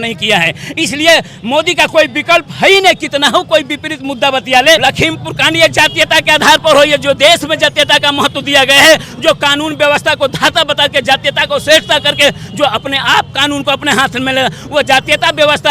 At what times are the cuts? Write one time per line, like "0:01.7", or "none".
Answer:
0:04.8